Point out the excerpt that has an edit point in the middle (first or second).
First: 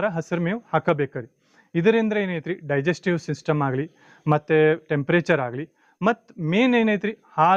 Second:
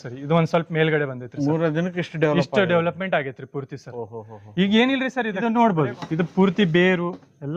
second